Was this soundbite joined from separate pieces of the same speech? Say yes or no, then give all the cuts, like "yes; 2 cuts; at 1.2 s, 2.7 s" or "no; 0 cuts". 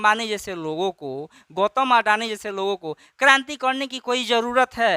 no; 0 cuts